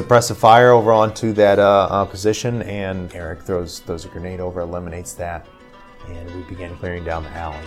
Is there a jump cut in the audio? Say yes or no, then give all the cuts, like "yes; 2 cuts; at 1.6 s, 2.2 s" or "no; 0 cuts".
yes; 2 cuts; at 3.1 s, 6.8 s